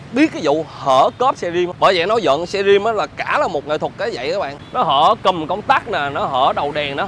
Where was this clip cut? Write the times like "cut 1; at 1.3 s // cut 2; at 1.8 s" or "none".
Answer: cut 1; at 1.7 s // cut 2; at 4.6 s